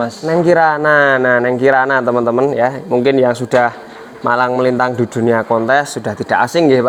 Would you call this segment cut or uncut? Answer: uncut